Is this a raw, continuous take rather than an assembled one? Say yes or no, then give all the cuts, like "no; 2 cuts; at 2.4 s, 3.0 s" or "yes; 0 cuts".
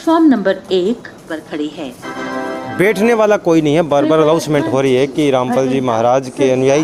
yes; 0 cuts